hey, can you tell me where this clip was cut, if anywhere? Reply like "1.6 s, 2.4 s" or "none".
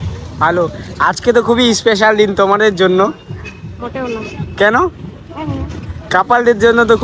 none